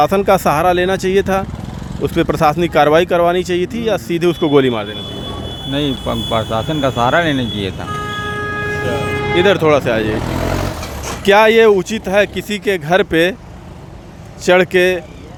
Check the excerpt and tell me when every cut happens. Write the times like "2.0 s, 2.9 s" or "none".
none